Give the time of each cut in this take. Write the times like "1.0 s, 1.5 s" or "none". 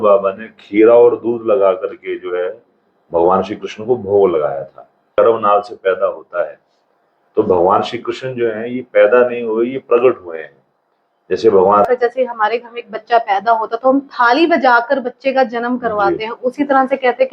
5.1 s, 11.8 s